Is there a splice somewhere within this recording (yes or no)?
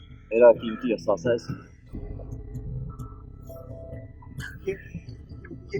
yes